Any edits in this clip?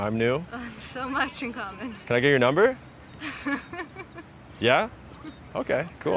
yes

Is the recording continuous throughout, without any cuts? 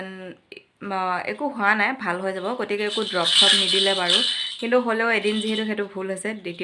yes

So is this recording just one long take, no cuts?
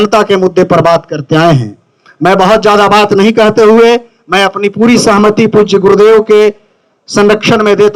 yes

